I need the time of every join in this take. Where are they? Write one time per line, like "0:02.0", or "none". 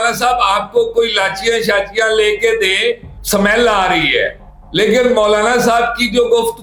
none